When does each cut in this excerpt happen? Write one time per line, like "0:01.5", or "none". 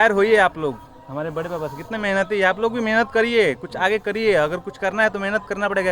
none